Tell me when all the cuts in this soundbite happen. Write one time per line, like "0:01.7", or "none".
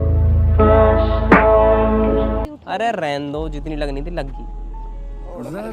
0:02.5